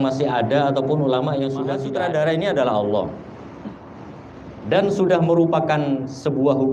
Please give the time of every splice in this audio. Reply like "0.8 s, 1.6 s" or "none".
1.9 s